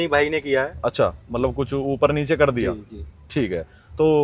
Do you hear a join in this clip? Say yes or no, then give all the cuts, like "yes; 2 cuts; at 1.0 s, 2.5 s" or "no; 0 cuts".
no; 0 cuts